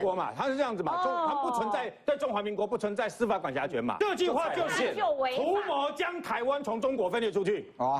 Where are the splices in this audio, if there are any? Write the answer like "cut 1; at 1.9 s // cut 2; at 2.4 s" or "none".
cut 1; at 3.9 s

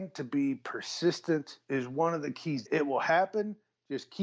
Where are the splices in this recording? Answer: cut 1; at 1.6 s // cut 2; at 2.6 s

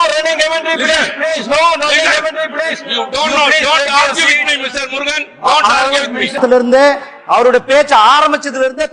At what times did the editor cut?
cut 1; at 6.3 s

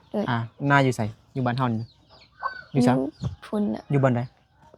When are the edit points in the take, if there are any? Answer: none

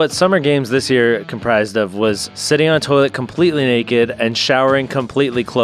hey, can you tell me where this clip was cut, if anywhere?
cut 1; at 2.3 s

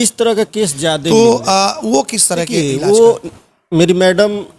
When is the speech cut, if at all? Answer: cut 1; at 1.0 s // cut 2; at 2.5 s

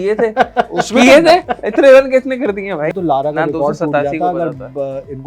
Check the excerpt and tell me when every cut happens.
cut 1; at 2.9 s

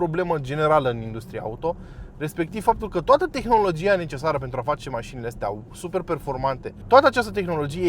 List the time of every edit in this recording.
cut 1; at 6.7 s

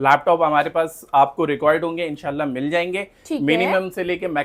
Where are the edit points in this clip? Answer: none

